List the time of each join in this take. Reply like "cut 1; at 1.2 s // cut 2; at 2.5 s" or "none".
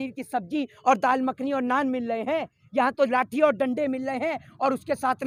none